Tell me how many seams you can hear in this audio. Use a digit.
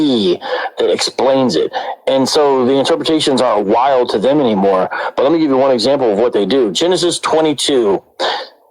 1